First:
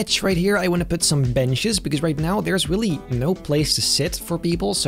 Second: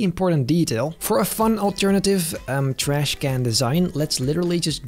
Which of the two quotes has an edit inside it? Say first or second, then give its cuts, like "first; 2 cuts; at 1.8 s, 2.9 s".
second; 1 cut; at 1.0 s